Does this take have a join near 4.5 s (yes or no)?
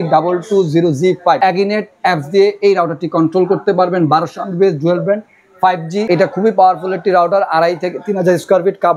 no